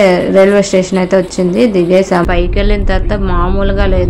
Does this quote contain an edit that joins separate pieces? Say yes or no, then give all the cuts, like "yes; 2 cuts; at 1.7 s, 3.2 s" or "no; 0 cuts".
yes; 1 cut; at 2.3 s